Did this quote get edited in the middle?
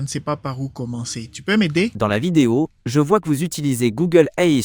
yes; 1 cut; at 1.9 s

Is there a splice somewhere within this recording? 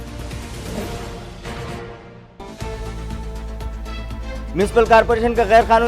yes; 1 cut; at 2.2 s

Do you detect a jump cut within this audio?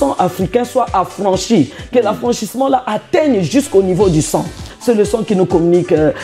yes; 1 cut; at 4.7 s

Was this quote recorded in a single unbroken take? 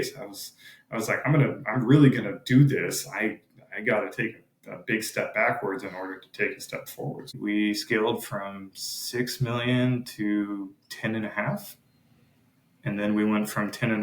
no; 1 cut; at 7.4 s

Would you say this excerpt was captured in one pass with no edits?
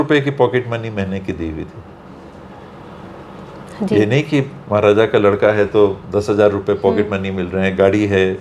yes; 0 cuts

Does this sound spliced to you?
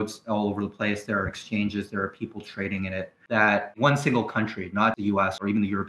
yes; 2 cuts; at 3.6 s, 5.1 s

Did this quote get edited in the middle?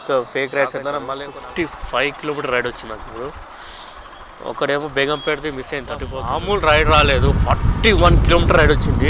yes; 2 cuts; at 1.0 s, 6.1 s

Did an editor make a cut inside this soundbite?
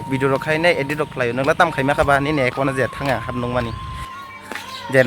yes; 1 cut; at 4.2 s

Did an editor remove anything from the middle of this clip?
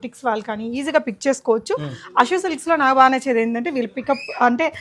no; 0 cuts

